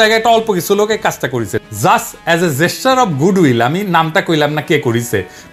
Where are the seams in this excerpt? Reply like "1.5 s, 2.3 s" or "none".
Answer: 1.7 s

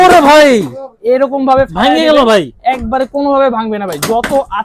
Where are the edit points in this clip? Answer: none

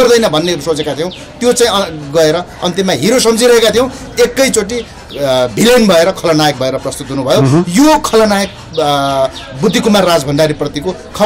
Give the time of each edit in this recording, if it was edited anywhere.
none

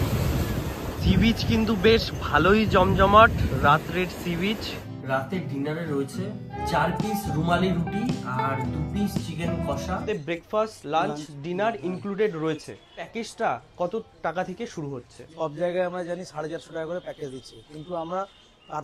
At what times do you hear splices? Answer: 1.0 s, 4.8 s, 6.6 s, 10.0 s, 13.2 s, 15.2 s

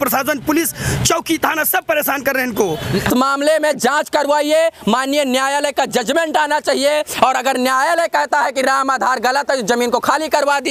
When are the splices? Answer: 3.1 s

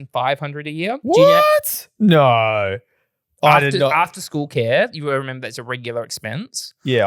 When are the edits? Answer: 1.0 s

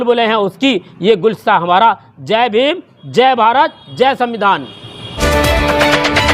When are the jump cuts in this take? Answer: 5.2 s

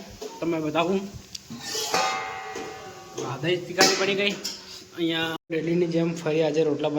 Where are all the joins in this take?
5.4 s

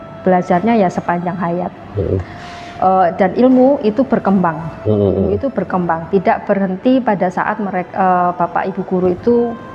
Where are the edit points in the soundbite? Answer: none

